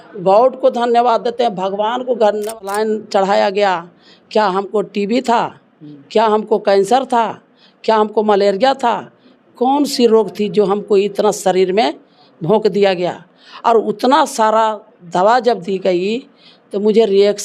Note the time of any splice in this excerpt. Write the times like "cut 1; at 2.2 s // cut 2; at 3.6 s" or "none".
cut 1; at 2.5 s